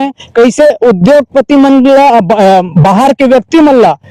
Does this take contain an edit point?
no; 0 cuts

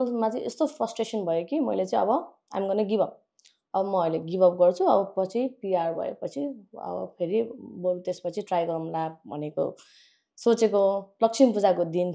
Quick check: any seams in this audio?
no; 0 cuts

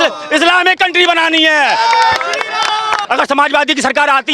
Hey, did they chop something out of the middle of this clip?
yes; 1 cut; at 3.0 s

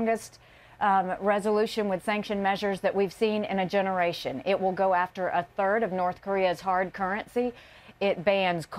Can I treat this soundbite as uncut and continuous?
no; 1 cut; at 1.1 s

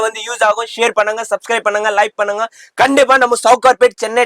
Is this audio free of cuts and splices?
yes; 0 cuts

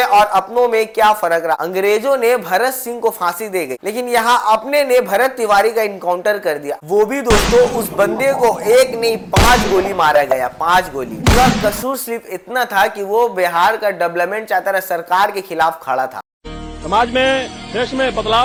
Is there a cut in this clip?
no; 0 cuts

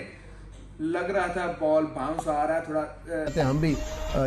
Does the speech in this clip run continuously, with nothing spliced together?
no; 1 cut; at 3.3 s

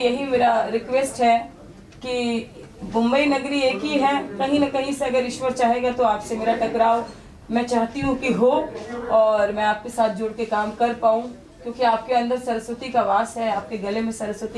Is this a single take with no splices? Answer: yes; 0 cuts

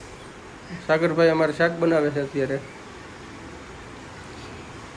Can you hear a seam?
no; 0 cuts

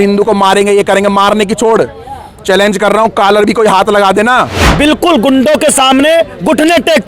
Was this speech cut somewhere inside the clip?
yes; 1 cut; at 4.6 s

